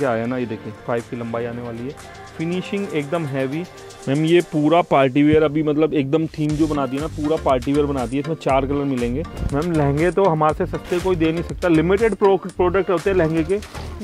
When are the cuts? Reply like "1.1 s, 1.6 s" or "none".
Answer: 0.8 s, 3.9 s, 9.4 s

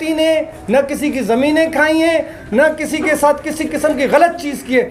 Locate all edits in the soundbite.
none

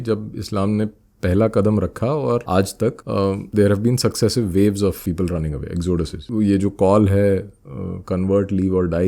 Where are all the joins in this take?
2.9 s, 5.0 s, 6.2 s

